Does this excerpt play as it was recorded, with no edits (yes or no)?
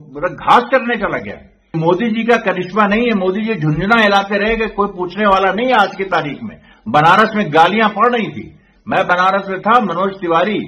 no